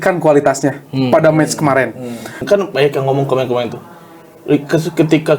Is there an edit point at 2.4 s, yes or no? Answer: yes